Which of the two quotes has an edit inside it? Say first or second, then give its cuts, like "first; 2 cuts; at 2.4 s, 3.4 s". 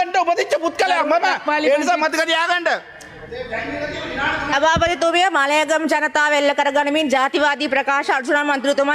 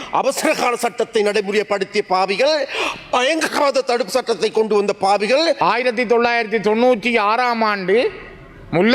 second; 1 cut; at 5.6 s